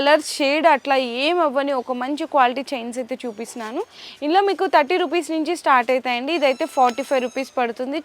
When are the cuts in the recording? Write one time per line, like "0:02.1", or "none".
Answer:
none